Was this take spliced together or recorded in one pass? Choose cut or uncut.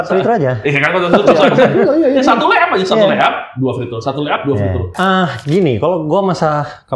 cut